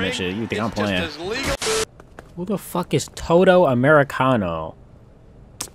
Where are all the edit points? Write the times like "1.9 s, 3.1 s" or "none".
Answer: 1.7 s